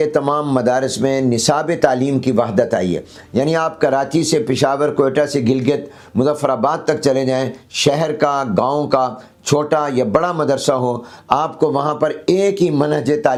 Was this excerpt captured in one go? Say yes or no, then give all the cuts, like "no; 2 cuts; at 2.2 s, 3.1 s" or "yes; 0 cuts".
yes; 0 cuts